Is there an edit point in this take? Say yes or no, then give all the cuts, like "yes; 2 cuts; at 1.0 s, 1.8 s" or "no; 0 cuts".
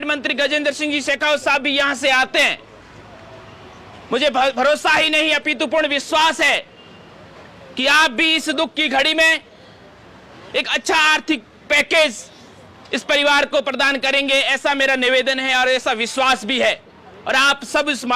no; 0 cuts